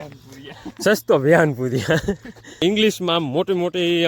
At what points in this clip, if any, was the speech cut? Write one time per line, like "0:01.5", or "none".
0:02.6